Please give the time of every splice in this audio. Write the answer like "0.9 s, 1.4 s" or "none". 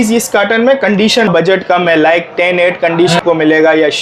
1.3 s, 3.2 s